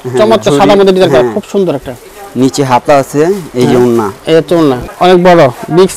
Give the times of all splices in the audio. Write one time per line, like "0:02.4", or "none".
0:04.9